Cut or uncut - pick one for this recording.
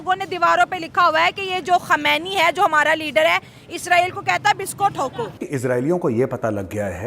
uncut